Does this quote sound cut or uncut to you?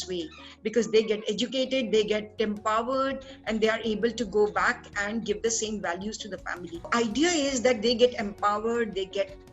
cut